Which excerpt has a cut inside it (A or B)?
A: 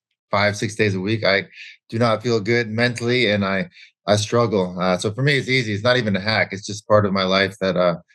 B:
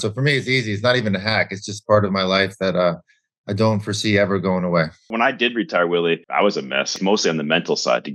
B